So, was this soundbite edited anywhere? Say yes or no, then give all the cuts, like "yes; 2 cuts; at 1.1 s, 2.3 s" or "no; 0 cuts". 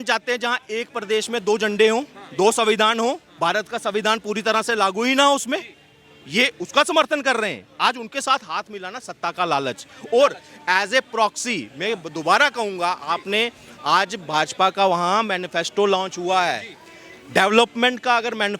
no; 0 cuts